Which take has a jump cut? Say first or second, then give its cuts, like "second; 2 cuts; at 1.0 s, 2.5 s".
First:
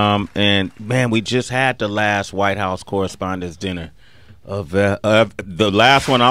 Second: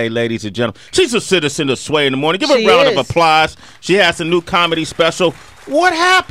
first; 1 cut; at 3.6 s